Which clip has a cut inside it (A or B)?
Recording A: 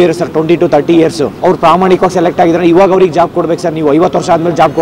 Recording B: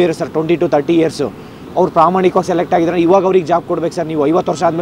A